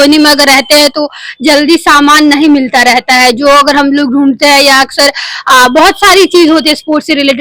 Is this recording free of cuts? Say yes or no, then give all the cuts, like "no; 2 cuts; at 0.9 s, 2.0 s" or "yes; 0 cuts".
yes; 0 cuts